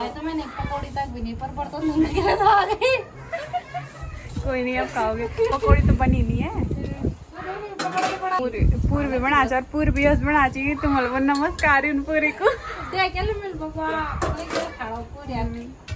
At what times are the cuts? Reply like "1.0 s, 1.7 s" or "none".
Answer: none

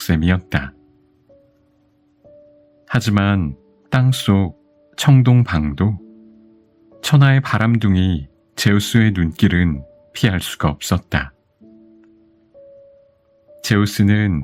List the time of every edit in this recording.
11.3 s, 13.6 s

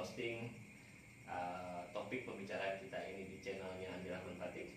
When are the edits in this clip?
none

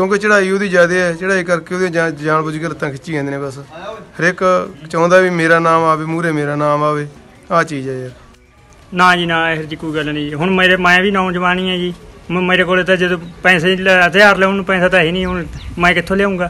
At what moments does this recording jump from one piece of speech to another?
8.3 s

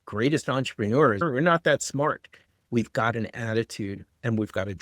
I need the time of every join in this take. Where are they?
1.2 s, 2.6 s

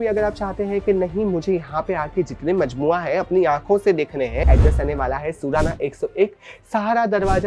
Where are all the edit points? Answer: 4.5 s

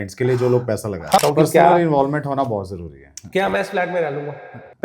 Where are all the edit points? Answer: 1.2 s

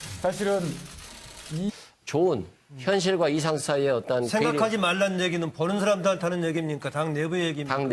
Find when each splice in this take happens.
none

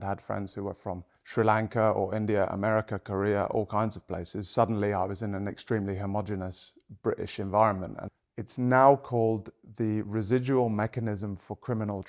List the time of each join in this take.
1.1 s, 8.0 s

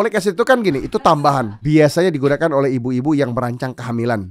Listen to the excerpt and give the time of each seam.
1.6 s

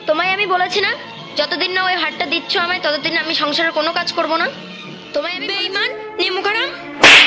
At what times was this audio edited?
5.4 s

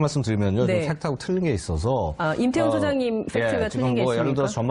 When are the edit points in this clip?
none

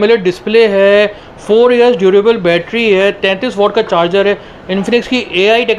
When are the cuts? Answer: none

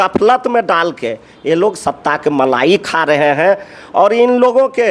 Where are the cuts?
none

